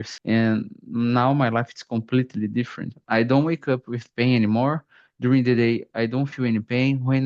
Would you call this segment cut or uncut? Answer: cut